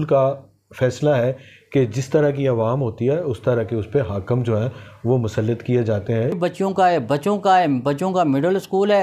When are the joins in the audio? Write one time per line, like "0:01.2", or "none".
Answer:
0:06.4